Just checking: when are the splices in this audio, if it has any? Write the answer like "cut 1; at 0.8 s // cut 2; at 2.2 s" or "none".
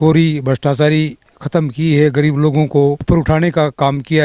cut 1; at 3.0 s